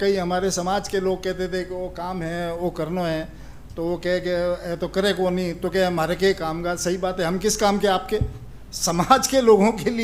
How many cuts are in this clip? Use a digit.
0